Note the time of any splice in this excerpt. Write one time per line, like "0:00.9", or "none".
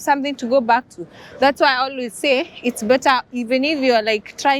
none